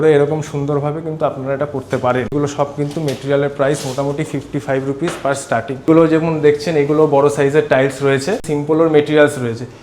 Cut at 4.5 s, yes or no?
no